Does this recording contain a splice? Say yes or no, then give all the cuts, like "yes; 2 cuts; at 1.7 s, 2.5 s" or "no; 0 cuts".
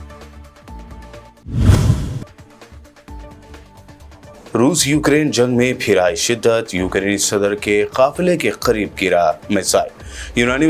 no; 0 cuts